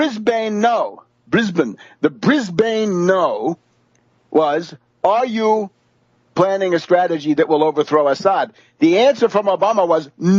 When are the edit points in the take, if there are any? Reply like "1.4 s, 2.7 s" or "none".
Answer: none